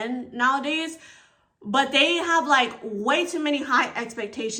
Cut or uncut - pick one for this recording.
uncut